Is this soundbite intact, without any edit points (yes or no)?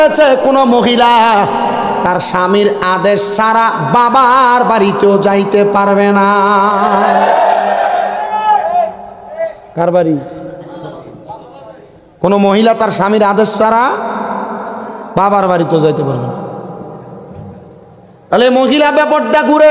yes